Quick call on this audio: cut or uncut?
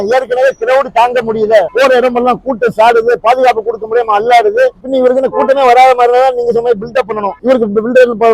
uncut